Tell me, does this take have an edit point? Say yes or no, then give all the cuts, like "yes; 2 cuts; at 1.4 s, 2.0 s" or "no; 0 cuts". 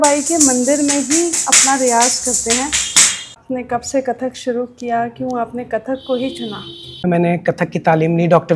yes; 2 cuts; at 3.3 s, 7.0 s